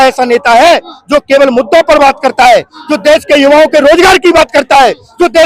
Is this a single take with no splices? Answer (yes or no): yes